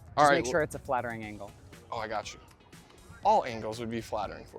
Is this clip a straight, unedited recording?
yes; 0 cuts

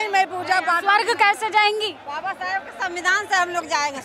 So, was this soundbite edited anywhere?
yes; 1 cut; at 2.0 s

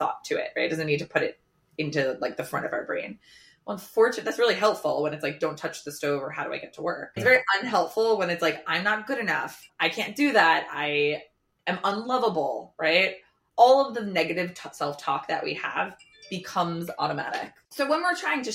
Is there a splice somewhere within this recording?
no; 0 cuts

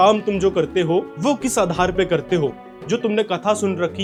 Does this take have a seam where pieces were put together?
no; 0 cuts

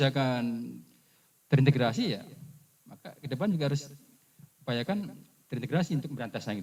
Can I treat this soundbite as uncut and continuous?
yes; 0 cuts

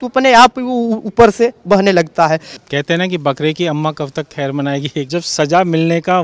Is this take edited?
yes; 2 cuts; at 2.6 s, 5.0 s

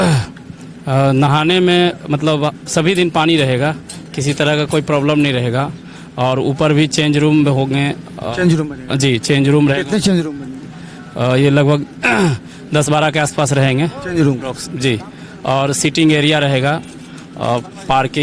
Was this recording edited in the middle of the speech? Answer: no; 0 cuts

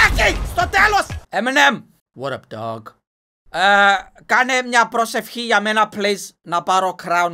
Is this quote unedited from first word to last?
no; 1 cut; at 1.2 s

